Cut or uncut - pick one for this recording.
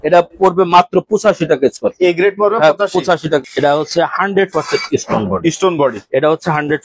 cut